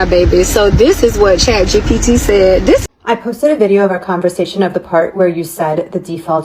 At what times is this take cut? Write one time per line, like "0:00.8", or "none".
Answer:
0:02.8